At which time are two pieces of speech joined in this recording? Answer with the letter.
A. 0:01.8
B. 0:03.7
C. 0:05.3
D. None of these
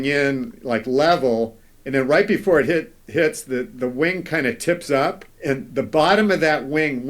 C